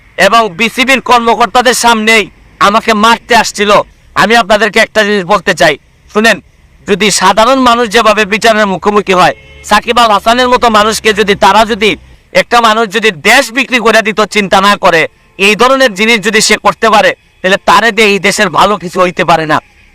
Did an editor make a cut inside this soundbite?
yes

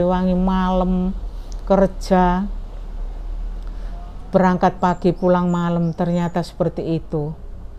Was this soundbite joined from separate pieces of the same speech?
no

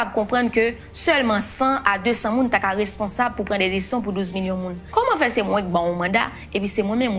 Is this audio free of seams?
no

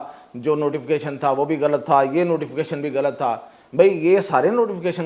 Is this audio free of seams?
yes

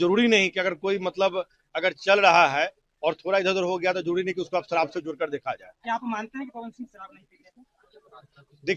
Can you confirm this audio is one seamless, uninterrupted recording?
yes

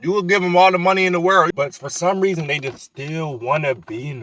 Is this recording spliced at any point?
yes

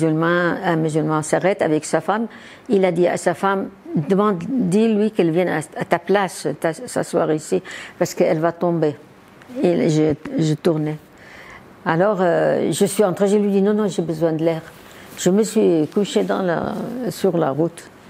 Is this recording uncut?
yes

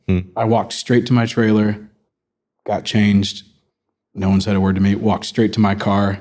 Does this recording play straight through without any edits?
yes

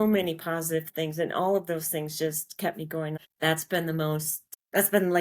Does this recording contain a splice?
yes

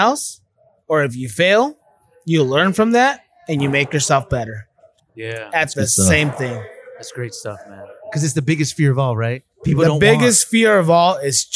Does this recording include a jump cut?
no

